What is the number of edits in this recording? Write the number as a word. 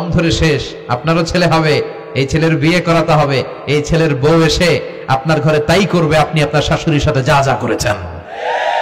zero